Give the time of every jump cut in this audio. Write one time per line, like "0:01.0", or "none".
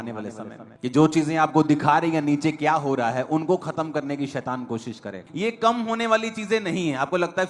0:05.2